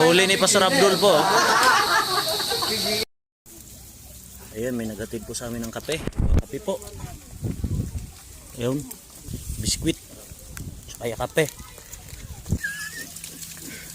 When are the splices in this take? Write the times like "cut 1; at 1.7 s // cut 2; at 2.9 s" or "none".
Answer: cut 1; at 2.9 s // cut 2; at 9.4 s // cut 3; at 12.6 s